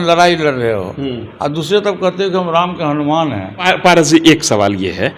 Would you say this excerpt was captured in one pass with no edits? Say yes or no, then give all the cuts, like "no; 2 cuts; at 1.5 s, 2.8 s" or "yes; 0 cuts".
no; 1 cut; at 3.6 s